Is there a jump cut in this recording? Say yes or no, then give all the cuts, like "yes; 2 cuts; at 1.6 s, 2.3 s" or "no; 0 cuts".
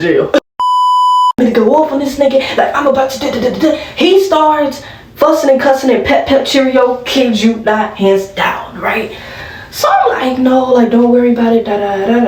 no; 0 cuts